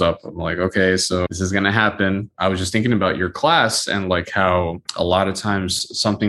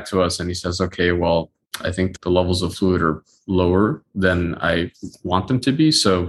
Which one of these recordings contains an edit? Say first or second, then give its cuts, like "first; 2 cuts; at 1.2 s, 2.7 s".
first; 3 cuts; at 1.3 s, 2.3 s, 4.8 s